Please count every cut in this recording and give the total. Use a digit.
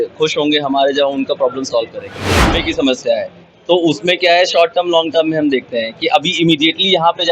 1